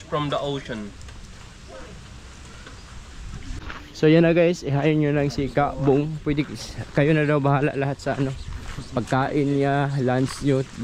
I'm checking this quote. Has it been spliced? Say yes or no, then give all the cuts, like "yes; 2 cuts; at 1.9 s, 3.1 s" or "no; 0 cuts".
yes; 1 cut; at 3.6 s